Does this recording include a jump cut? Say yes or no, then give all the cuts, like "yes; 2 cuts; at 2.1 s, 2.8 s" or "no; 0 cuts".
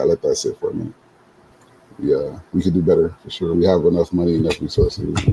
yes; 1 cut; at 1.0 s